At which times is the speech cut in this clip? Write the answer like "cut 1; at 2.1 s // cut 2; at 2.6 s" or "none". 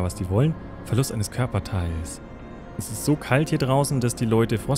cut 1; at 2.9 s